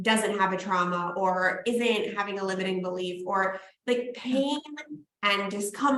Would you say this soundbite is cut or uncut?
uncut